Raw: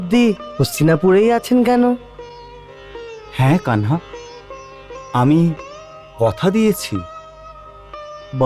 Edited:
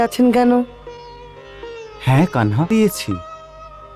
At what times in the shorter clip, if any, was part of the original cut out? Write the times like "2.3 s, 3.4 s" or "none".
2.7 s